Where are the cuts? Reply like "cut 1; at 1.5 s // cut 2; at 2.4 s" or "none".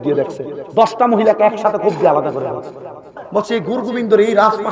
cut 1; at 3.3 s

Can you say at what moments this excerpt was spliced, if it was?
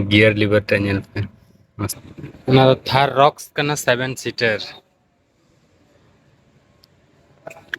cut 1; at 2.0 s

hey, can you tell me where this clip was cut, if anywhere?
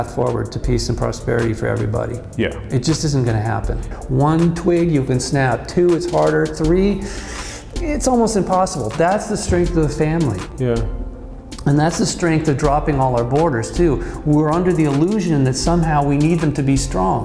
cut 1; at 3.9 s

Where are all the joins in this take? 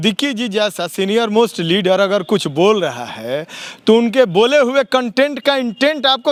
none

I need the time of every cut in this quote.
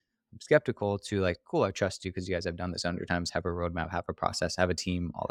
none

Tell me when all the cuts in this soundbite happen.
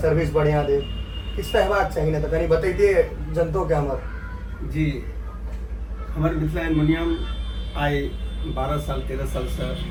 none

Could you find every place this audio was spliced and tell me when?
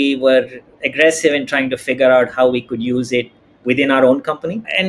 none

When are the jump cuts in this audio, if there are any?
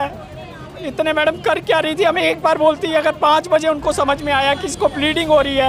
none

